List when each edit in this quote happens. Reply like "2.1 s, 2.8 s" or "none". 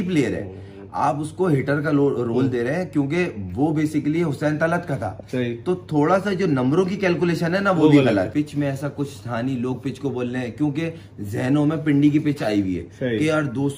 8.3 s